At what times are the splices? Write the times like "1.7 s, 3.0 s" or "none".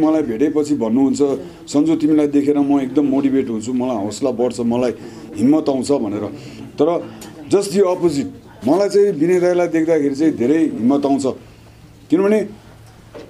none

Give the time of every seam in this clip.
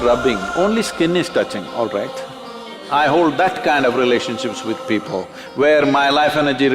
2.8 s

